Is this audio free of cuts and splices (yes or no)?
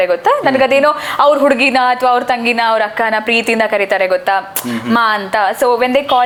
yes